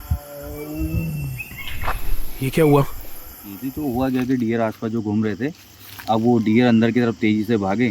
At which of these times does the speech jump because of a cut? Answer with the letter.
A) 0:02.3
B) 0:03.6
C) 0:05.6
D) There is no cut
B